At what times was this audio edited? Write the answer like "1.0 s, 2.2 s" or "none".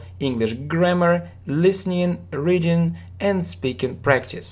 1.1 s